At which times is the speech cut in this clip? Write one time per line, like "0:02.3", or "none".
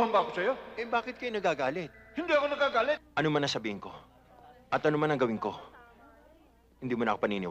0:03.1